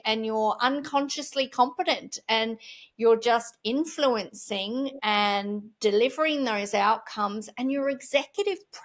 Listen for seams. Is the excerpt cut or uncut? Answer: uncut